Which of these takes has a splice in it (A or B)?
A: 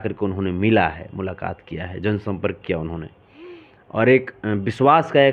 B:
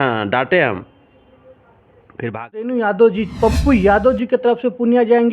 B